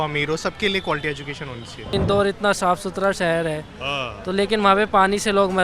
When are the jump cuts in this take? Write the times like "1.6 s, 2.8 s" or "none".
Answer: 1.9 s